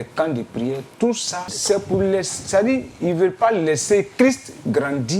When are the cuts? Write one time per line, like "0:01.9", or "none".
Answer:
0:01.6